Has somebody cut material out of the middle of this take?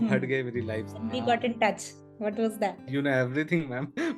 yes; 1 cut; at 1.0 s

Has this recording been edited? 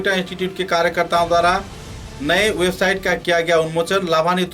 no; 0 cuts

